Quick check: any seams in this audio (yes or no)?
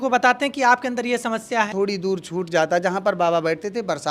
yes